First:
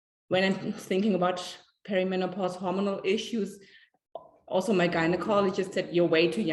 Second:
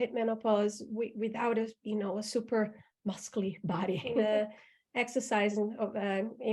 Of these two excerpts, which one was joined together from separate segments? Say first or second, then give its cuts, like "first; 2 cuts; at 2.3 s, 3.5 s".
second; 1 cut; at 4.2 s